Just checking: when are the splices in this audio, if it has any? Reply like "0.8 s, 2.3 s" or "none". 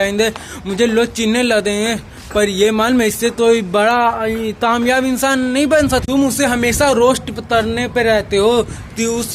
6.1 s